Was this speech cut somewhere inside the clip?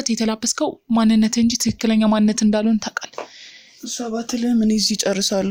no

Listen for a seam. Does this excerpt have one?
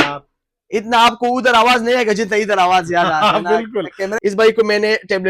yes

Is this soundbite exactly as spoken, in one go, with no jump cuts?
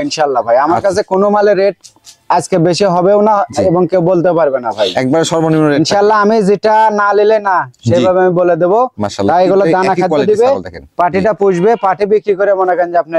yes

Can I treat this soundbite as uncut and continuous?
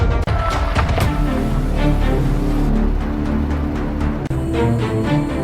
no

